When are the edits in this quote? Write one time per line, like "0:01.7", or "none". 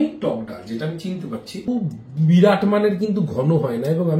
0:01.5